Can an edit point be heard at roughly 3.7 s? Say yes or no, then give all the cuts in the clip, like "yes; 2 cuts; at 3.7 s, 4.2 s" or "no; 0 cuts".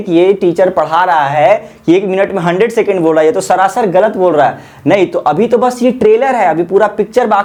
no; 0 cuts